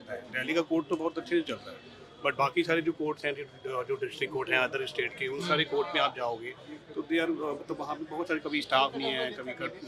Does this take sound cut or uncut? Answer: uncut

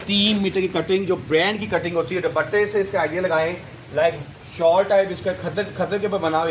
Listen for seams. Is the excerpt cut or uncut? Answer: uncut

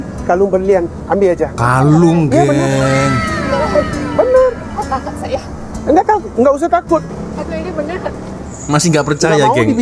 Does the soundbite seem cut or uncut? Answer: cut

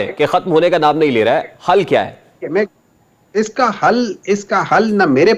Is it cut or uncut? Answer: uncut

